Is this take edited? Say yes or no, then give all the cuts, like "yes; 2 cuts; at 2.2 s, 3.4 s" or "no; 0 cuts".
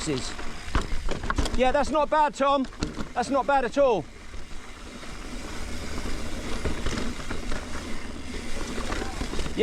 no; 0 cuts